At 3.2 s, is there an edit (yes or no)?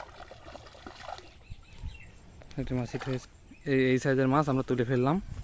yes